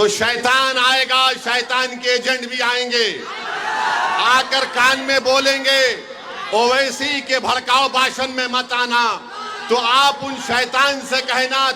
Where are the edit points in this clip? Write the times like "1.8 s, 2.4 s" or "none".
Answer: none